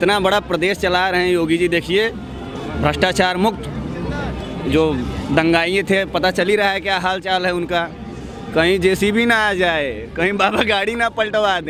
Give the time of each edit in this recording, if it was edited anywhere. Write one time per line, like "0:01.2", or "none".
none